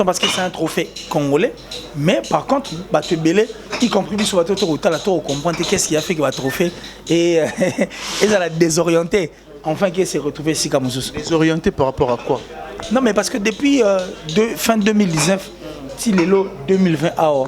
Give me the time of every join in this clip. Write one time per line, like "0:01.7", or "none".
none